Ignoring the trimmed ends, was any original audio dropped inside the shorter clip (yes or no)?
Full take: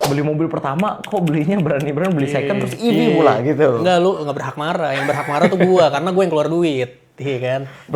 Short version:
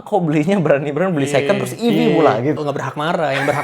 yes